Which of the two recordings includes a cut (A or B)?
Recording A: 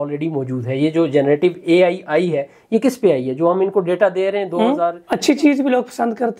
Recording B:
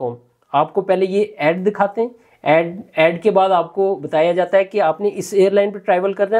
A